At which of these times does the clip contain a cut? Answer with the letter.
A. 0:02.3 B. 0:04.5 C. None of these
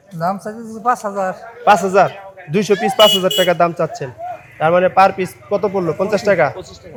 C